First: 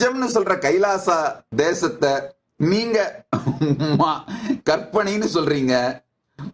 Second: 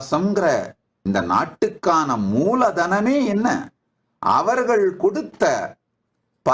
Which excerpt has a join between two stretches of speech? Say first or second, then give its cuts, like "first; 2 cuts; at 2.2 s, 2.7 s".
first; 1 cut; at 1.4 s